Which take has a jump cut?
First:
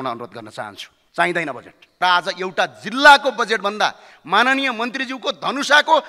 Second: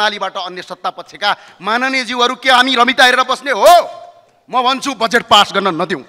first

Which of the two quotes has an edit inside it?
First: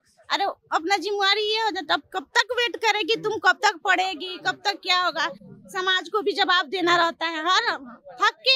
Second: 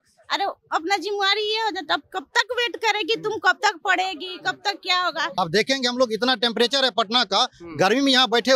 second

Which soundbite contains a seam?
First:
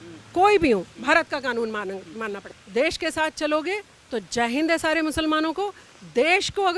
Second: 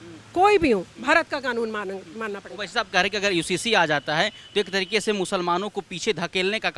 first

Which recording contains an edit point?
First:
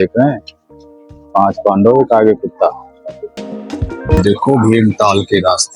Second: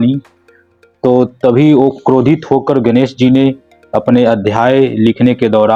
first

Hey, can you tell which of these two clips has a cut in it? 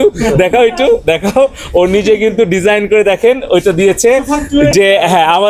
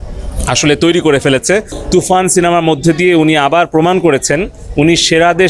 second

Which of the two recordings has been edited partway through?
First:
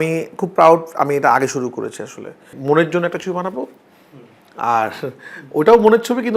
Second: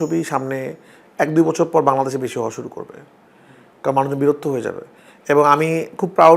first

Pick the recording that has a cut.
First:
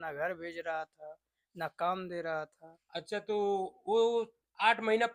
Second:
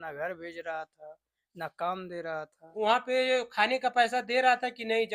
second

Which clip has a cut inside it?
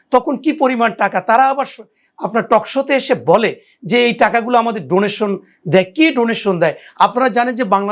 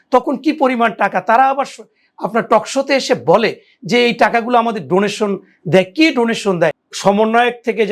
second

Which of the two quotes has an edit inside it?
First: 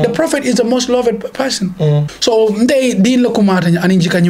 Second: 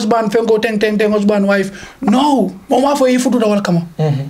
first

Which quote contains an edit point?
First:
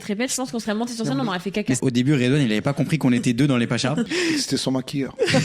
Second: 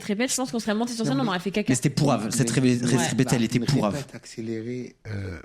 first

